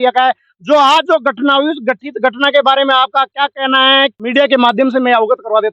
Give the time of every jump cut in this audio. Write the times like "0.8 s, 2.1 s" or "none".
4.2 s